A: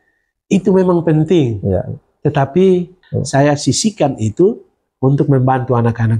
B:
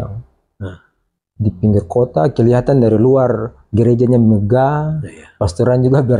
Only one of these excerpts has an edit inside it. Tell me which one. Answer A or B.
A